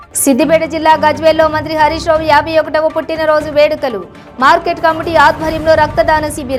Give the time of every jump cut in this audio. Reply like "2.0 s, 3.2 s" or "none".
none